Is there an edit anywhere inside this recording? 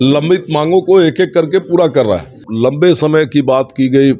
yes; 1 cut; at 2.5 s

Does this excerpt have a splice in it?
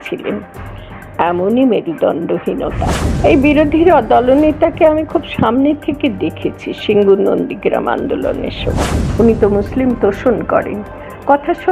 yes; 2 cuts; at 3.0 s, 9.0 s

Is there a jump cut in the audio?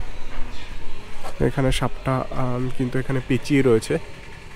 no; 0 cuts

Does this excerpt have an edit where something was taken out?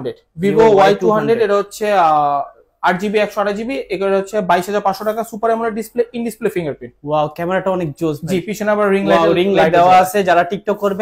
no; 0 cuts

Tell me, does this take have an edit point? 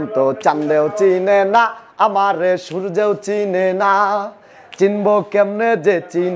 no; 0 cuts

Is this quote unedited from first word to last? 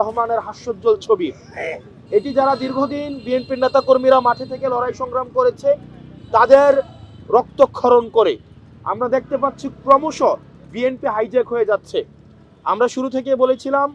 yes; 0 cuts

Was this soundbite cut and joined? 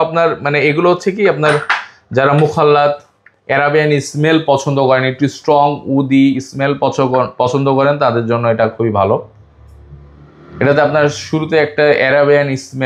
no; 0 cuts

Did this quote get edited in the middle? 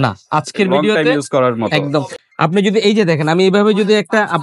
no; 0 cuts

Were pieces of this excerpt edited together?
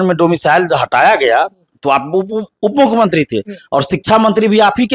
no; 0 cuts

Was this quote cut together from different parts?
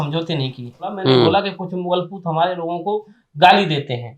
yes; 1 cut; at 1.0 s

